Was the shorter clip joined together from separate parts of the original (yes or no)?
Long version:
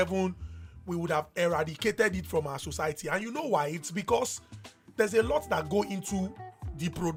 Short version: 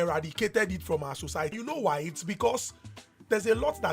yes